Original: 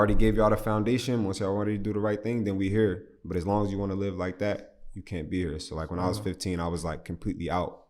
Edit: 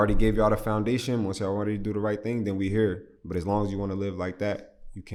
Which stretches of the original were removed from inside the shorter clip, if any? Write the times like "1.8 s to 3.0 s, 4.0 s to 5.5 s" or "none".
none